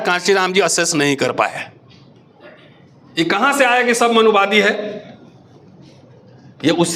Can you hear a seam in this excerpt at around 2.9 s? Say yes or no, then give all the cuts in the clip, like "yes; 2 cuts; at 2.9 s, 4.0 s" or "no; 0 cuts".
yes; 1 cut; at 2.9 s